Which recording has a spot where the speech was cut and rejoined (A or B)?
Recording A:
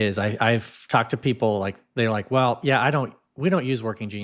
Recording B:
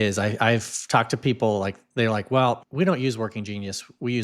B